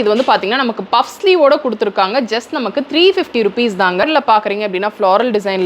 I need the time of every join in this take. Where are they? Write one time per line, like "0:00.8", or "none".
0:04.0